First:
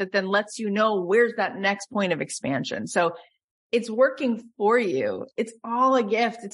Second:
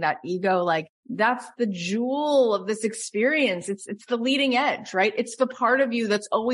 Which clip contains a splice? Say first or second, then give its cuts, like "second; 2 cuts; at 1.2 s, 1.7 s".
second; 1 cut; at 1.0 s